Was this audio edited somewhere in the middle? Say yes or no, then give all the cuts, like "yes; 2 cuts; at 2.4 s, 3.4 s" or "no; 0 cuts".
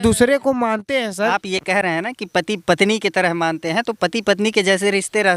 yes; 1 cut; at 1.4 s